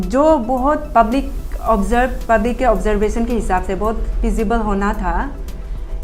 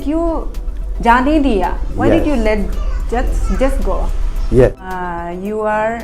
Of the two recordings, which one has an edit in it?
second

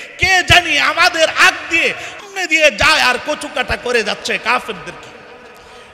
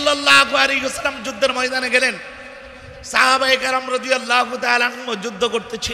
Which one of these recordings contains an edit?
first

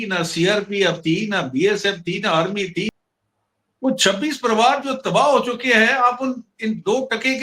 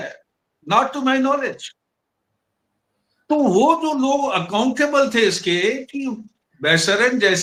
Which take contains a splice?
first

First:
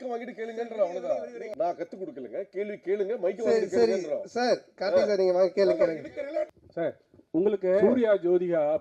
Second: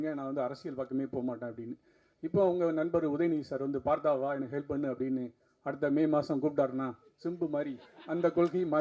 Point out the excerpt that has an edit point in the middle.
first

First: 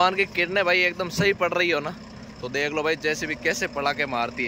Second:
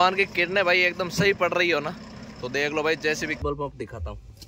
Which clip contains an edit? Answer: second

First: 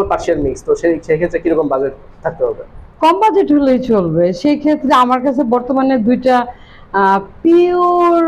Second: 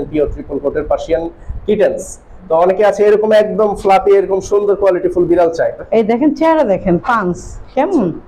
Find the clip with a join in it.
second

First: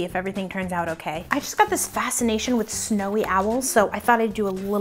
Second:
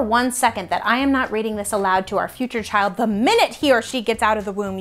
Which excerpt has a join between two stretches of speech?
first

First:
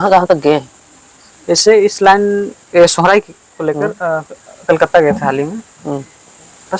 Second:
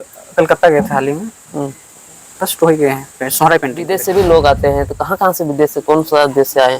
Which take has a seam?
second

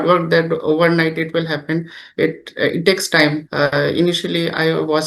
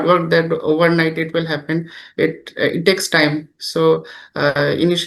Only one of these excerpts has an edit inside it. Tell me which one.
first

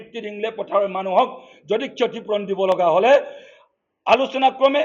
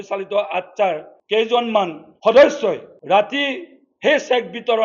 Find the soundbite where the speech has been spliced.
second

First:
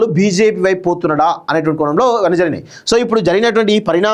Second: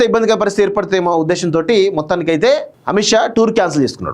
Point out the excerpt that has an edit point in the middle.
second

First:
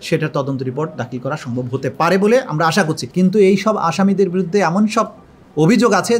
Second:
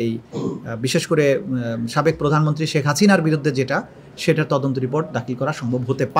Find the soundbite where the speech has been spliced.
first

